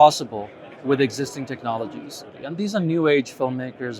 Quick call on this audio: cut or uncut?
uncut